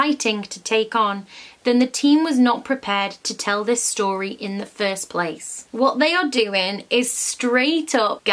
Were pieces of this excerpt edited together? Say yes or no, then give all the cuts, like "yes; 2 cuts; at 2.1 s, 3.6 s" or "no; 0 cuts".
yes; 1 cut; at 5.6 s